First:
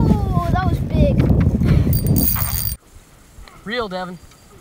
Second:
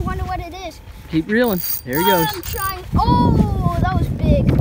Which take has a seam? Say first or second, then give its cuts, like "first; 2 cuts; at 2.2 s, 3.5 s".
first; 1 cut; at 2.9 s